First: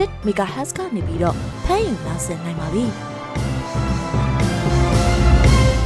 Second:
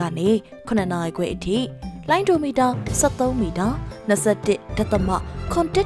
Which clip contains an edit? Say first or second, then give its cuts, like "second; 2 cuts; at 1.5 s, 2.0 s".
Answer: first; 1 cut; at 3.1 s